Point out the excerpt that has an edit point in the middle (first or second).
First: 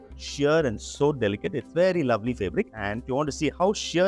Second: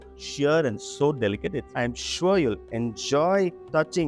second